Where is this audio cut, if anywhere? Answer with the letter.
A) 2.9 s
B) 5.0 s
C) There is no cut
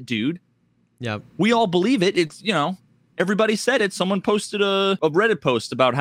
B